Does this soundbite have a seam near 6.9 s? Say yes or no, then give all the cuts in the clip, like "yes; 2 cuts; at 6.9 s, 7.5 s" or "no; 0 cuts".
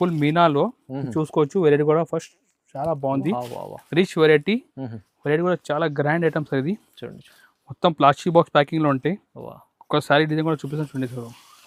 no; 0 cuts